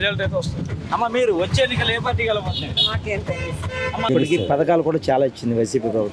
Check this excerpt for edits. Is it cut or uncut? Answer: cut